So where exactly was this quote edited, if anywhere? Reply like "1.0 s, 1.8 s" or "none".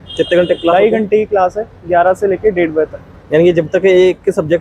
none